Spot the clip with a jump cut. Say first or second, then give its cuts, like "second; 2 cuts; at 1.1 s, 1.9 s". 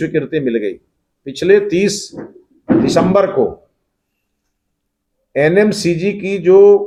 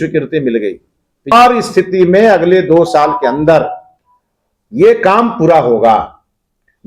second; 1 cut; at 1.3 s